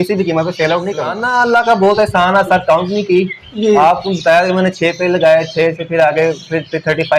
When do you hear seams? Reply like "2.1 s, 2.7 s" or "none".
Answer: 1.2 s